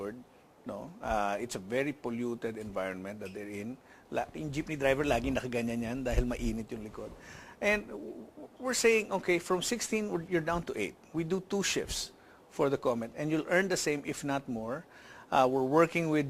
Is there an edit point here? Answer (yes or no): yes